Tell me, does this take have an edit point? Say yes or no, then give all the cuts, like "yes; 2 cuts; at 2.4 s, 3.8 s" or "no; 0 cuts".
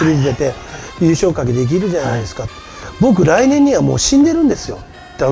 no; 0 cuts